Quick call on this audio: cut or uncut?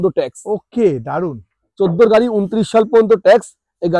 uncut